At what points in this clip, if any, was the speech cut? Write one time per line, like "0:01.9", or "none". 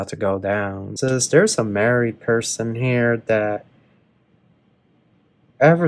0:00.9

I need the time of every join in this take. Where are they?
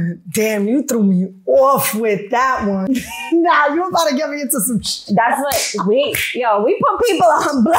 0:02.9

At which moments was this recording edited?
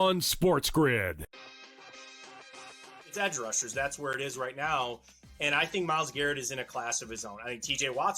0:01.2

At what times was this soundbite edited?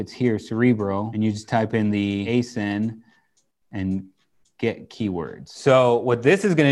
0:01.1
0:02.3
0:05.4

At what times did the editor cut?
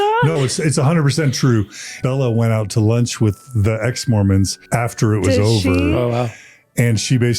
0:02.0
0:04.6

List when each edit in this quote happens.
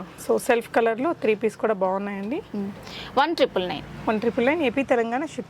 none

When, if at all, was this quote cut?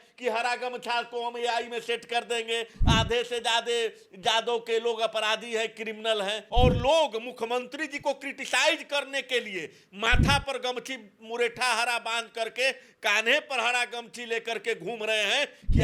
0:06.4

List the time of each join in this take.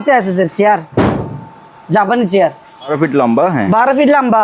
0:02.9

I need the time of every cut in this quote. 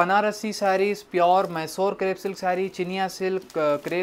none

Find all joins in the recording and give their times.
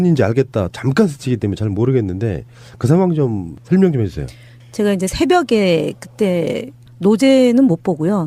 0:01.3

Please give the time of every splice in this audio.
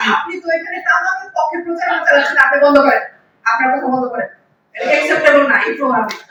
none

